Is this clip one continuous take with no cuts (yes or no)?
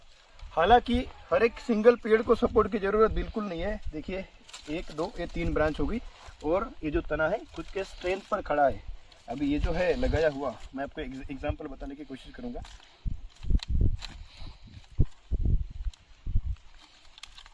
yes